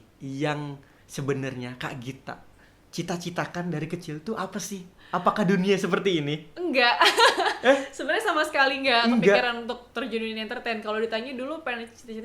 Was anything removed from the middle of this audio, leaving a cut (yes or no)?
no